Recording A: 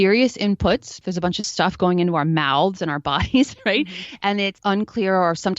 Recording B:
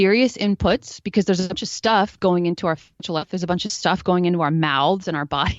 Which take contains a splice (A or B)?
A